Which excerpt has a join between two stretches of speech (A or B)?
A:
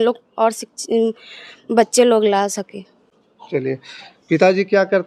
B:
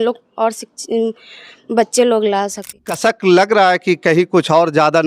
B